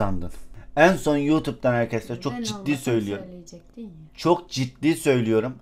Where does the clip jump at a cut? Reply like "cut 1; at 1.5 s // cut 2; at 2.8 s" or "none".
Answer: none